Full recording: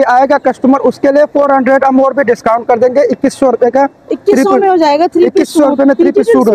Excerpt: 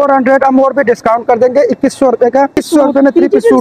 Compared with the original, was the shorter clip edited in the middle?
yes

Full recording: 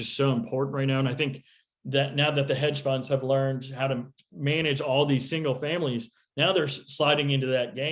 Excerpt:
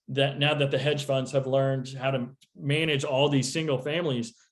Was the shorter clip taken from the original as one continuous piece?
yes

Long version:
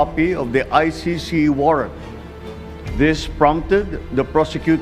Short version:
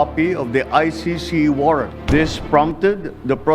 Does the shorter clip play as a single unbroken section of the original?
no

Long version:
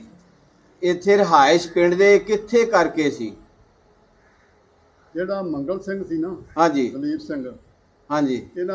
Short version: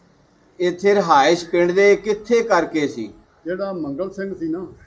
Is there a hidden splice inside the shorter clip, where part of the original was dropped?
yes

